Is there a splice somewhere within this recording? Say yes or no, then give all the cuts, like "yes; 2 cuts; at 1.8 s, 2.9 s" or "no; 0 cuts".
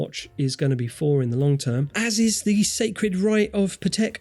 no; 0 cuts